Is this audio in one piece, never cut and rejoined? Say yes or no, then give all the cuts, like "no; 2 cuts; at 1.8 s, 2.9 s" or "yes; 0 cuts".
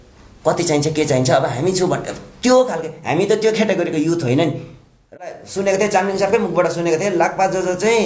no; 1 cut; at 5.1 s